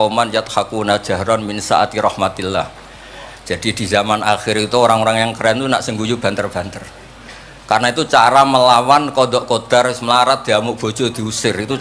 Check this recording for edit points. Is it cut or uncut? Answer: uncut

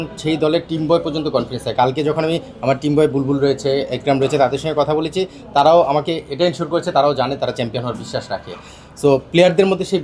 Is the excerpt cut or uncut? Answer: uncut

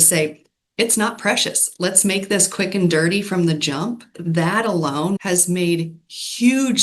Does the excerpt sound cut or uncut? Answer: cut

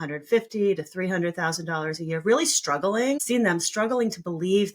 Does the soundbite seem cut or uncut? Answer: cut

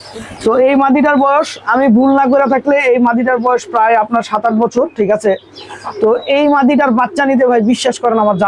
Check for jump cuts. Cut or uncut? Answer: uncut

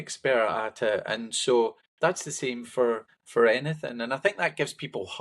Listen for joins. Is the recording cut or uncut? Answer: cut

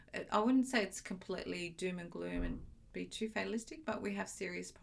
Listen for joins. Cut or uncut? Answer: uncut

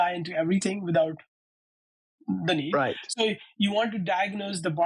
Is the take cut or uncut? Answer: uncut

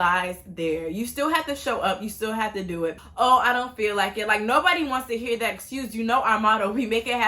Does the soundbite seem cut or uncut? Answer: cut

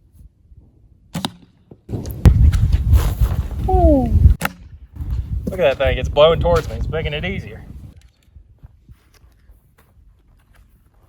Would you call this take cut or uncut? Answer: cut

